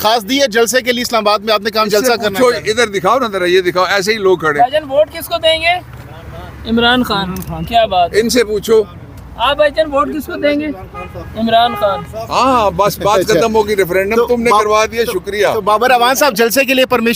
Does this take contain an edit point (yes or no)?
no